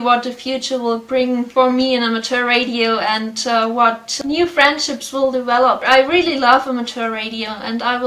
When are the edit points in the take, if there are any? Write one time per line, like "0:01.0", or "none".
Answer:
0:01.5
0:04.2
0:05.8